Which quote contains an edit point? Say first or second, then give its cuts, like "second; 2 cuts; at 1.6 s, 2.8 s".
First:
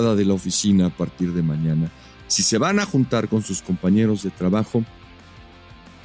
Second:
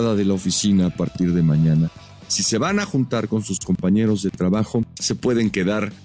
second; 1 cut; at 5.0 s